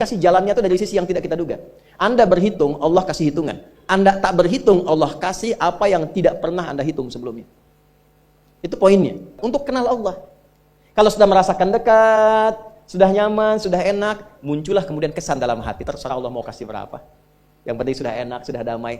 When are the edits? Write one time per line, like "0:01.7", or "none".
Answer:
0:09.4